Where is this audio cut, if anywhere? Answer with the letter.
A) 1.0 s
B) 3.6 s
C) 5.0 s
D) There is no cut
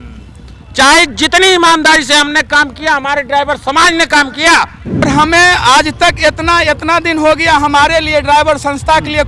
C